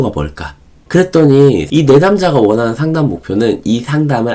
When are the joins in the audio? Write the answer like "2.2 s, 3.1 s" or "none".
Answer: 1.6 s